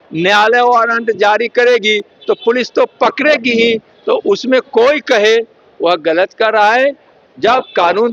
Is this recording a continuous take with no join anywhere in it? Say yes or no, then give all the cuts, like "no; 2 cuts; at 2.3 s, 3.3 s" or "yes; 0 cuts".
yes; 0 cuts